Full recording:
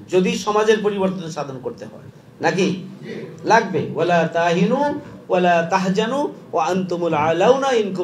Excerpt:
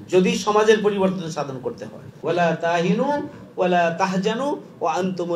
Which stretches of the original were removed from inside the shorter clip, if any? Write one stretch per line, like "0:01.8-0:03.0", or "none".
0:02.2-0:03.9